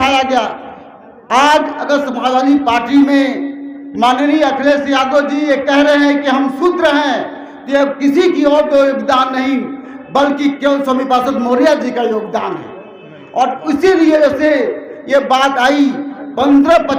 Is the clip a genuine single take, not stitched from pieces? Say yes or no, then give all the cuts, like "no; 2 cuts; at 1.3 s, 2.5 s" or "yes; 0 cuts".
yes; 0 cuts